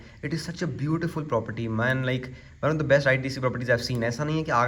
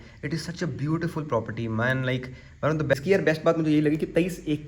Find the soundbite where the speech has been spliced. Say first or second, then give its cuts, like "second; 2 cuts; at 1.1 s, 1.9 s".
second; 1 cut; at 2.9 s